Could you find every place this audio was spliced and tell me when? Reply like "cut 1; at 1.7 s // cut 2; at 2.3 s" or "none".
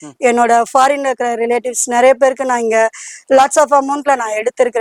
none